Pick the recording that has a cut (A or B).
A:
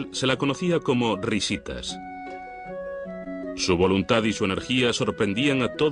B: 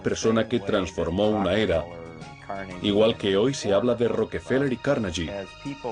B